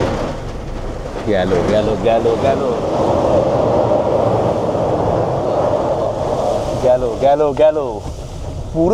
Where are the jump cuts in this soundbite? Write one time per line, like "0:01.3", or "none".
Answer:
none